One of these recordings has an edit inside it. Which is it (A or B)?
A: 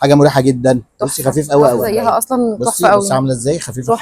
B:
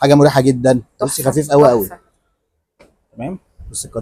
A